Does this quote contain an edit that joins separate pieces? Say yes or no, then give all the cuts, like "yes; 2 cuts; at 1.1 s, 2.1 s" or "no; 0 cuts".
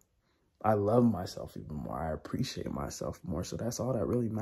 no; 0 cuts